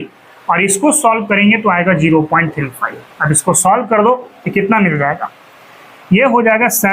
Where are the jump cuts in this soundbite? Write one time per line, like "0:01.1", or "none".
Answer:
none